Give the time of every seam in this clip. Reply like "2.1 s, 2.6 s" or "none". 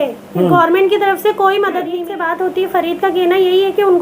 1.9 s